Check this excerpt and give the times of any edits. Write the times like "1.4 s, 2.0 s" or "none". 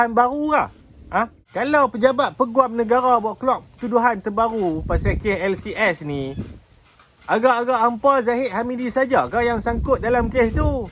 1.4 s